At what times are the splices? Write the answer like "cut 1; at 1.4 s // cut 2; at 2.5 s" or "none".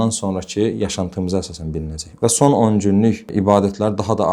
cut 1; at 2.0 s